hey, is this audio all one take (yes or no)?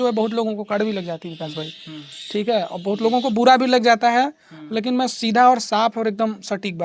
yes